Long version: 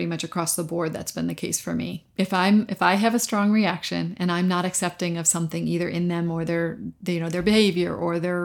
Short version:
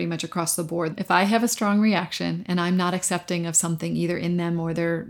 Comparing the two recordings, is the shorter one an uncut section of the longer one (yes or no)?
no